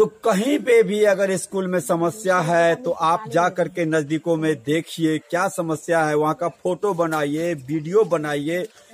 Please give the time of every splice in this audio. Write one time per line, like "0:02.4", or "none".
none